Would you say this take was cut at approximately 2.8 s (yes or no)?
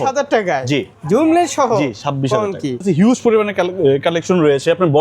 yes